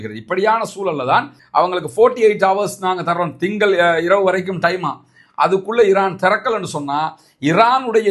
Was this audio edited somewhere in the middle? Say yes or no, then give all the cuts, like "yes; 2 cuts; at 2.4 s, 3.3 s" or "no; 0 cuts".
yes; 1 cut; at 1.4 s